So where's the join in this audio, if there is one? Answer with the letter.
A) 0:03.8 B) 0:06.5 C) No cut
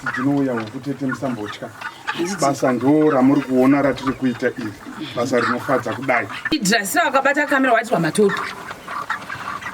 B